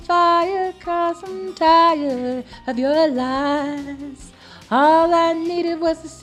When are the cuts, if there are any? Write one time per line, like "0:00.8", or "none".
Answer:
none

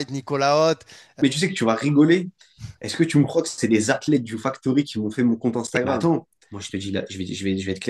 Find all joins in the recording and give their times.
0:01.2
0:06.0

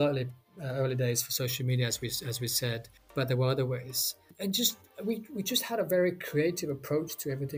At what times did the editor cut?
0:03.0
0:04.3

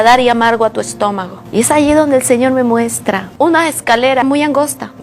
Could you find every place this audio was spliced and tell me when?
0:01.3
0:04.2

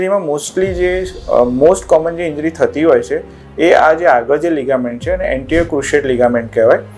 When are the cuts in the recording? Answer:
none

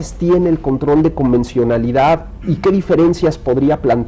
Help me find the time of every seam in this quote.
0:01.8

